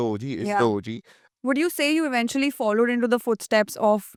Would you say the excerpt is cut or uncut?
uncut